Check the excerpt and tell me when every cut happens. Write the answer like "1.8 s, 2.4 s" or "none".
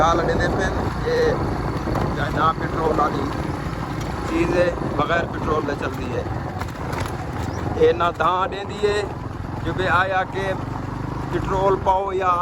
none